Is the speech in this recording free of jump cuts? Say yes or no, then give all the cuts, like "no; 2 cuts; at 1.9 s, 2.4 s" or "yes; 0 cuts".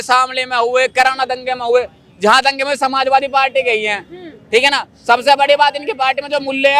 yes; 0 cuts